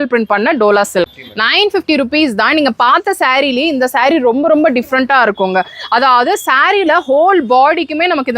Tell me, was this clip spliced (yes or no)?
yes